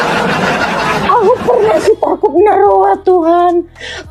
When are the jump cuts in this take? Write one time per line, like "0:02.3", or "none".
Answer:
0:01.0